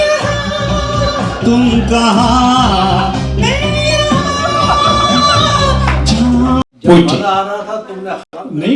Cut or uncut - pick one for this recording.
cut